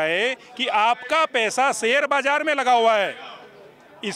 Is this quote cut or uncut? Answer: uncut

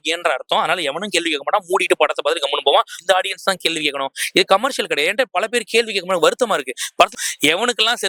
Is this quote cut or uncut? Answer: cut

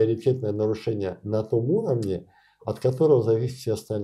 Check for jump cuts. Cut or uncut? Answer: uncut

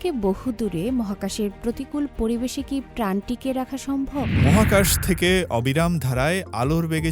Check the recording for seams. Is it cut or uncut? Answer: cut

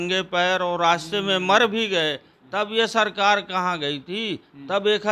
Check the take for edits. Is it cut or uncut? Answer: uncut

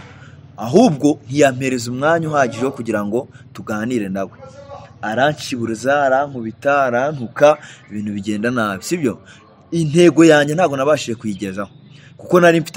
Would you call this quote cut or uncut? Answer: uncut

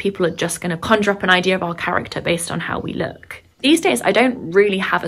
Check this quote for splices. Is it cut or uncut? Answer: uncut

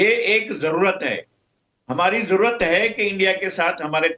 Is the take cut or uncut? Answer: uncut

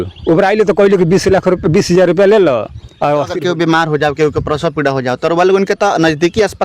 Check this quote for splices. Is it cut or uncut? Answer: cut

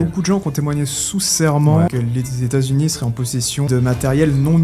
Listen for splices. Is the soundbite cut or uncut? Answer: cut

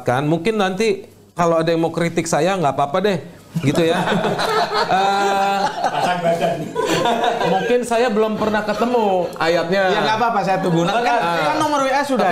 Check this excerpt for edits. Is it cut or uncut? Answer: uncut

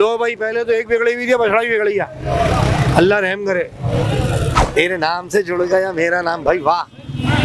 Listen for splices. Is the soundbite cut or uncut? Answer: cut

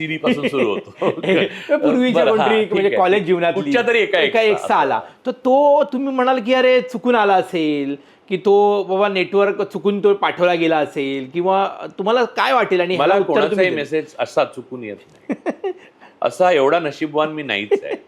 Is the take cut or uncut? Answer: uncut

